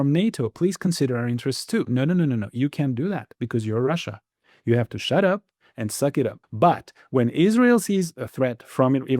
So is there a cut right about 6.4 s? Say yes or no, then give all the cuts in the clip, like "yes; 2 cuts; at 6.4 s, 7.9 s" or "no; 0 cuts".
yes; 2 cuts; at 6.4 s, 8.2 s